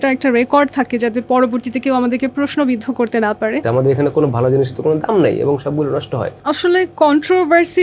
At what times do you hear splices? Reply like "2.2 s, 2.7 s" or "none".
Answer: 3.6 s, 6.3 s